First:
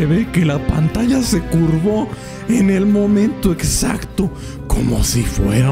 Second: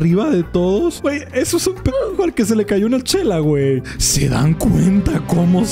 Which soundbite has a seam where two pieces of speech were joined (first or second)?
second